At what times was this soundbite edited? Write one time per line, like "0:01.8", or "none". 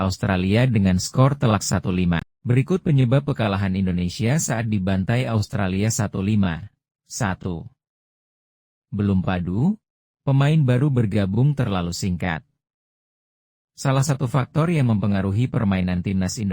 0:02.3